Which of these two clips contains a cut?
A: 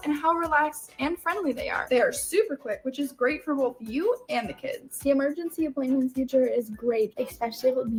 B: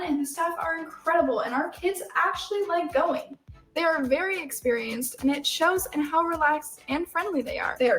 B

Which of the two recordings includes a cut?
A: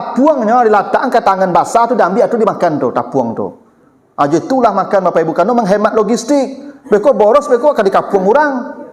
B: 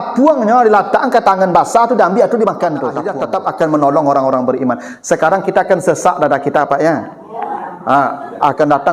B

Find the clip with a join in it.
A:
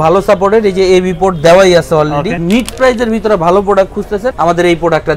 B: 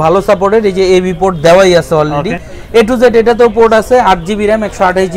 A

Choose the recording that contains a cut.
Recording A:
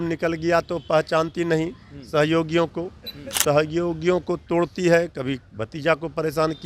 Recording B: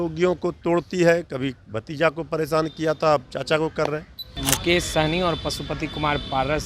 B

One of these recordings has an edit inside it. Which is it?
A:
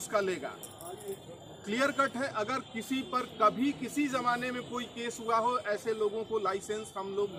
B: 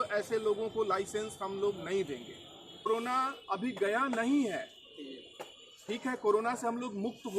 B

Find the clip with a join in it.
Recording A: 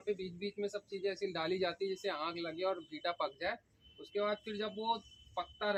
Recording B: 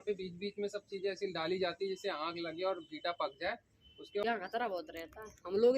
B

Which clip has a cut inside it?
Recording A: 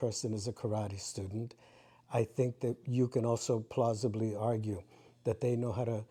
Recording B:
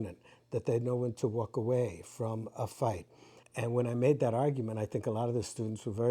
B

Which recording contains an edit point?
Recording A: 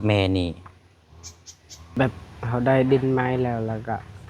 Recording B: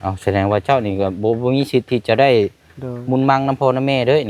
A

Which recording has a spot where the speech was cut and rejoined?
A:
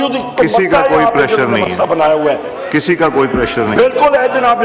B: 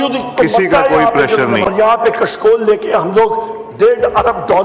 B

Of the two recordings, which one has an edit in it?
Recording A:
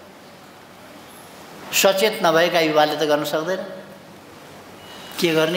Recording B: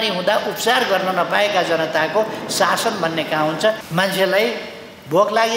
B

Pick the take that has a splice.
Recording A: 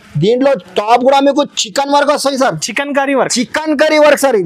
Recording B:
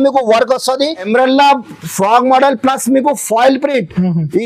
B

